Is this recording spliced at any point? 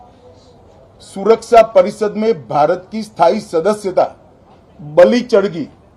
no; 0 cuts

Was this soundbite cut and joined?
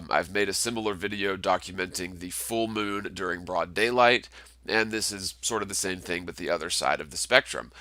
no; 0 cuts

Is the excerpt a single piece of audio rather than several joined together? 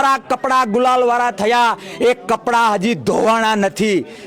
yes; 0 cuts

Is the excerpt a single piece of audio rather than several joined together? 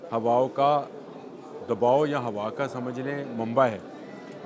yes; 0 cuts

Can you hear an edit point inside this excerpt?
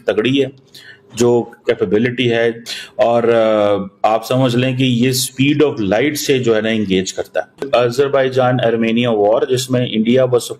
yes; 2 cuts; at 2.6 s, 7.7 s

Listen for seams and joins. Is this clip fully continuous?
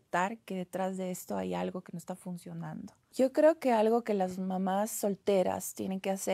no; 1 cut; at 3.0 s

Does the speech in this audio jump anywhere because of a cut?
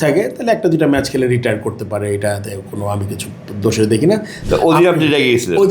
yes; 1 cut; at 4.3 s

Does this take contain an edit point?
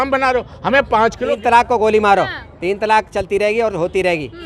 yes; 1 cut; at 1.2 s

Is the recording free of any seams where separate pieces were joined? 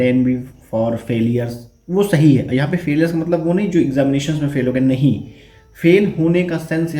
yes; 0 cuts

